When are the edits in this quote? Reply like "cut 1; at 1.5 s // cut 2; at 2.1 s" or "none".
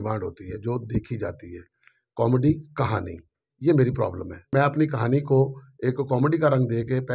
cut 1; at 4.5 s